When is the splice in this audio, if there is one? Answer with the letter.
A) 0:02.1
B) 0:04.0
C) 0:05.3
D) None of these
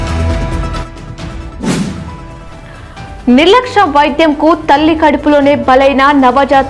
A